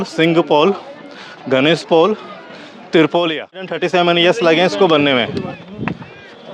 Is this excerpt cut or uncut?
cut